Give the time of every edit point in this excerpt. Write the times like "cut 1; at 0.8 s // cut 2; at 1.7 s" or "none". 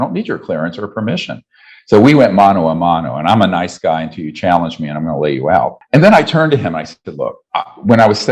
cut 1; at 5.8 s // cut 2; at 7.4 s